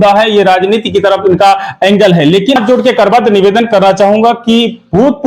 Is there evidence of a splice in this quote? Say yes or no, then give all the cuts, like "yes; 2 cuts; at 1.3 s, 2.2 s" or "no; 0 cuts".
yes; 1 cut; at 2.6 s